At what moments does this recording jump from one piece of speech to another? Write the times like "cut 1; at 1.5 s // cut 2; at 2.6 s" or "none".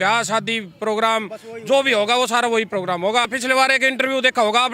cut 1; at 3.3 s